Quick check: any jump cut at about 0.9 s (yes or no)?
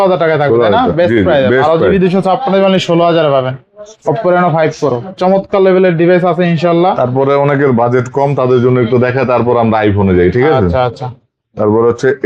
no